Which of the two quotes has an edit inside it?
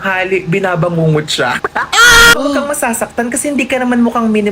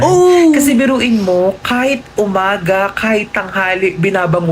first; 1 cut; at 2.4 s

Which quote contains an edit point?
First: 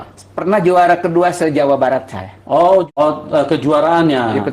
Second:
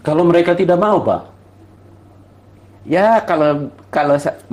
first; 1 cut; at 2.9 s

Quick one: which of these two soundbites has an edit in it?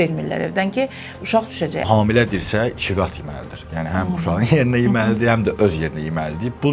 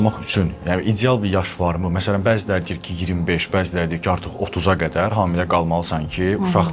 first; 1 cut; at 1.8 s

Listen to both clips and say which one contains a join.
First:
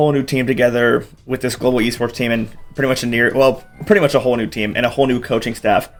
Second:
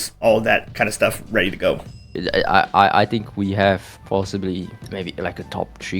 second; 1 cut; at 2.0 s

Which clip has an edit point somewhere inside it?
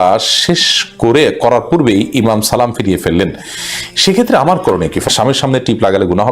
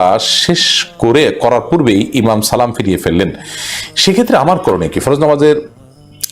first; 1 cut; at 5.1 s

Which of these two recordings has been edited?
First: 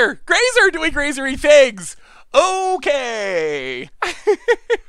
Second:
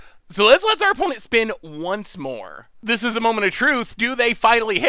second; 1 cut; at 2.6 s

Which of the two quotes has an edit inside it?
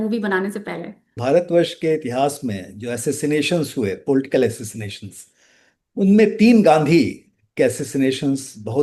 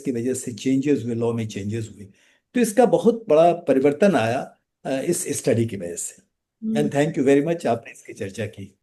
first; 1 cut; at 1.2 s

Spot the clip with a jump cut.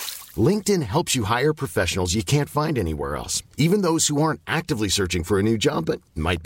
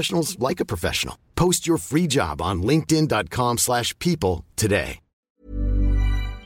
second; 1 cut; at 5.4 s

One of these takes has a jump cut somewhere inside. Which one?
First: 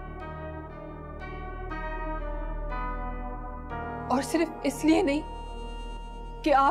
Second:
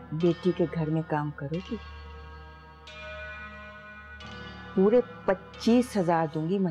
second; 1 cut; at 4.7 s

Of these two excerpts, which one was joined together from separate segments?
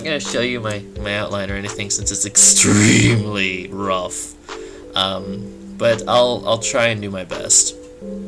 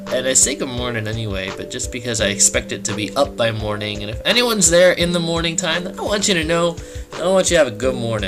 first; 1 cut; at 1.2 s

